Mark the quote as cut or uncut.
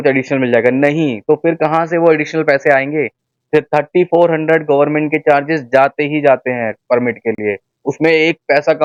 uncut